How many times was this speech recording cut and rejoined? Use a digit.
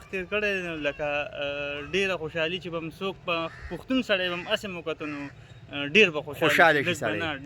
0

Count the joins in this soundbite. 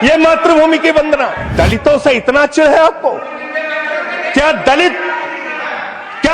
1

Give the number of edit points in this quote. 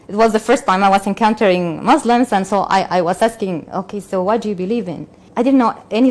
0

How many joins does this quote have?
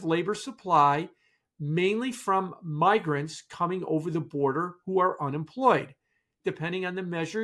1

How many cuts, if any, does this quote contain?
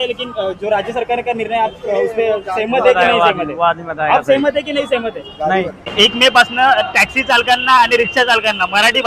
0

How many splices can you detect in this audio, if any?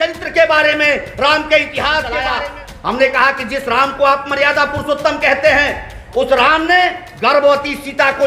1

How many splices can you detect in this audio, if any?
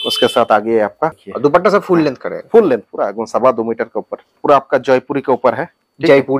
2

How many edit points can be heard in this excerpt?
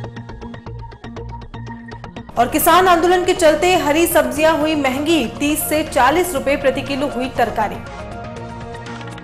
1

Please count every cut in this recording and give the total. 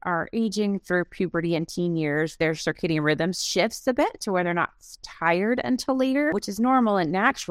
1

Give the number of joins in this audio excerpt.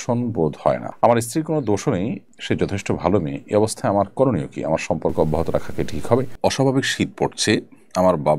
3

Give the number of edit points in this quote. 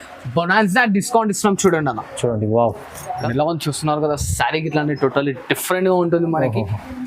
1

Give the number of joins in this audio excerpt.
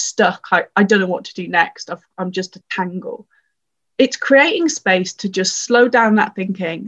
1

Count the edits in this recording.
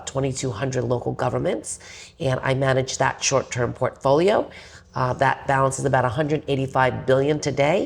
0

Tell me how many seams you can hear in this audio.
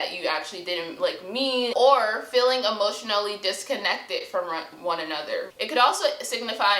2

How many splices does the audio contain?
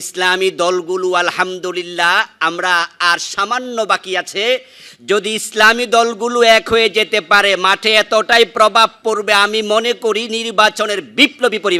0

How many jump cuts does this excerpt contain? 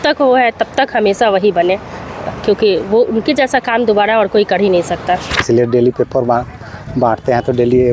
1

